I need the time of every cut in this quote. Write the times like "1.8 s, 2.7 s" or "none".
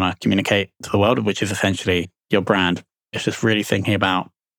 3.1 s